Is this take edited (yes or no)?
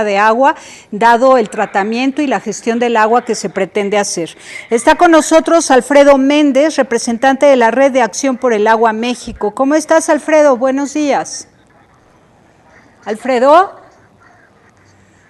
yes